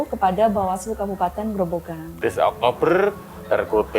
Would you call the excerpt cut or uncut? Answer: cut